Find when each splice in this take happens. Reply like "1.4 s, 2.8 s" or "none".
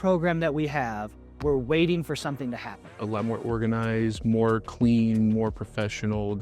2.9 s